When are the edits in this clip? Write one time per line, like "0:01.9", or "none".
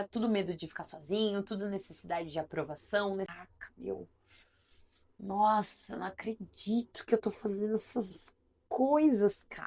0:03.4